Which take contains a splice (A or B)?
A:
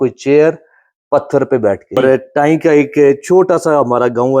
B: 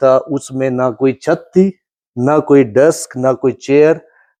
A